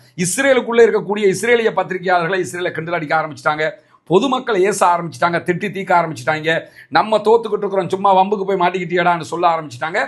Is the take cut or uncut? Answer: uncut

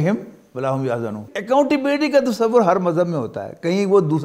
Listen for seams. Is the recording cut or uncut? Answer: cut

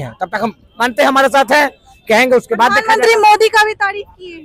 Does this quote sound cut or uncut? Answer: uncut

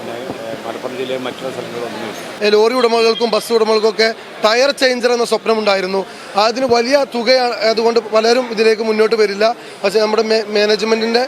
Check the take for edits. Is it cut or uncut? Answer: cut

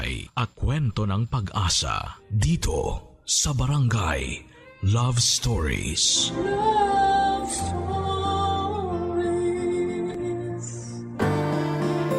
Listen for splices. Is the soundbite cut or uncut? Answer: cut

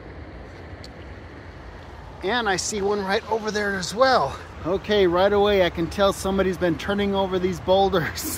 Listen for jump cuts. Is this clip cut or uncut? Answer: cut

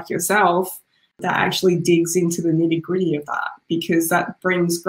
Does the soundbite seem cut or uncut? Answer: cut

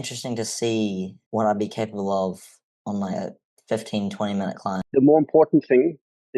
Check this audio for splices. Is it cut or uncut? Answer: cut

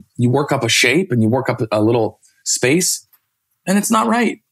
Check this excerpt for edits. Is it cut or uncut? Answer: uncut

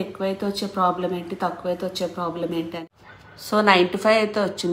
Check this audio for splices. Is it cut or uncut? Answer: cut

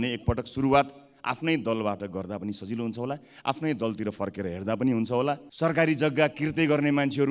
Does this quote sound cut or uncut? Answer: cut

